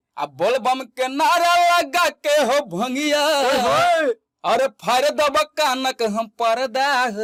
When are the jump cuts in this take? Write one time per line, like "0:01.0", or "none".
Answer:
none